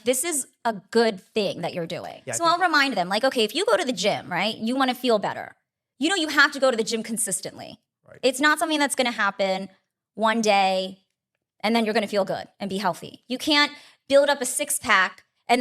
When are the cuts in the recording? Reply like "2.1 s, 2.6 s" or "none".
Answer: 2.1 s